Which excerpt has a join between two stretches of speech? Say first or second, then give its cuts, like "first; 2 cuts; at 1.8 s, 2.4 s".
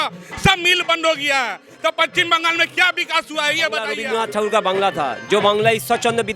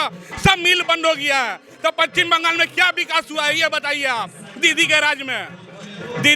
first; 1 cut; at 4.0 s